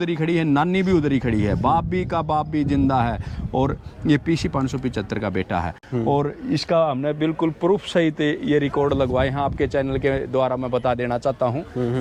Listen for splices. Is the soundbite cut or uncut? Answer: uncut